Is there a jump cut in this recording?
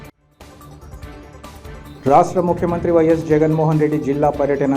no; 0 cuts

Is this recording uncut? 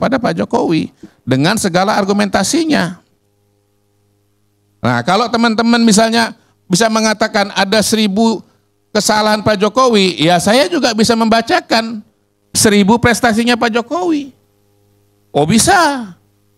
yes; 0 cuts

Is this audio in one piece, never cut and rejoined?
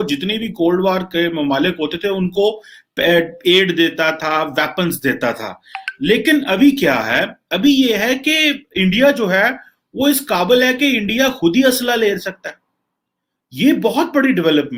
yes; 0 cuts

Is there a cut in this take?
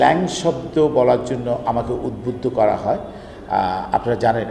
no; 0 cuts

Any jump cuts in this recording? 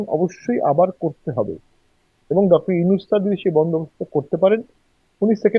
no; 0 cuts

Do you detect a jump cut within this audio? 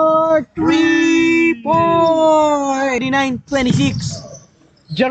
yes; 1 cut; at 3.0 s

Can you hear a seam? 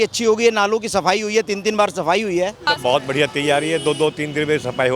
yes; 1 cut; at 2.7 s

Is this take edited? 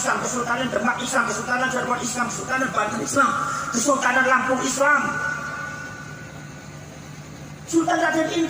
yes; 1 cut; at 4.7 s

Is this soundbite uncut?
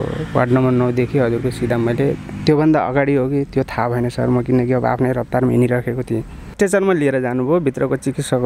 no; 2 cuts; at 2.3 s, 6.5 s

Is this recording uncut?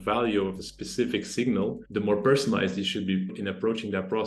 no; 2 cuts; at 1.8 s, 3.4 s

